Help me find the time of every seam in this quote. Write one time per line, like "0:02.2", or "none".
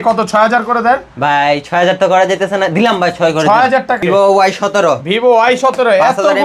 0:04.0